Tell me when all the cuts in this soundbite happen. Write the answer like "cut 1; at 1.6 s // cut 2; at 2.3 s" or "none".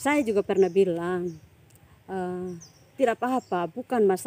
none

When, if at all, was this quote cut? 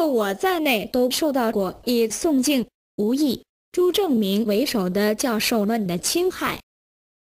cut 1; at 4.5 s

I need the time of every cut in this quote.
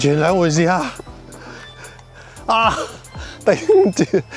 none

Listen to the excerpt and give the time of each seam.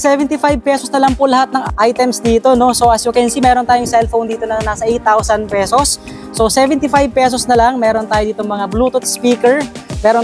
cut 1; at 1.7 s

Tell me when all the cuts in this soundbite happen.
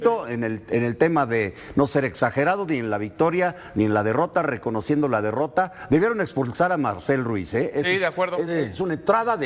none

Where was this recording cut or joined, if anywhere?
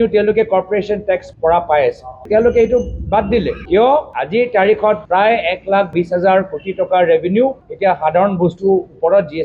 none

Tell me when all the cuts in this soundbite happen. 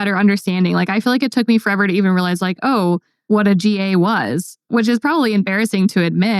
cut 1; at 3.1 s

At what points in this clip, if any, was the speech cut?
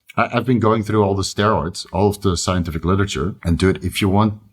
cut 1; at 3.4 s

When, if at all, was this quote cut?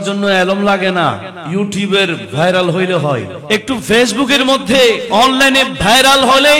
cut 1; at 1.3 s // cut 2; at 3.3 s

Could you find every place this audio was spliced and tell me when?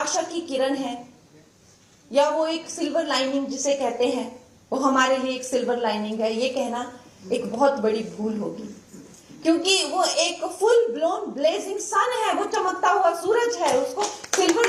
none

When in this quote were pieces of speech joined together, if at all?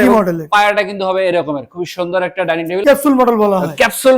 cut 1; at 2.8 s

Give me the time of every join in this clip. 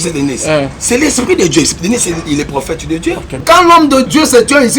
cut 1; at 3.3 s

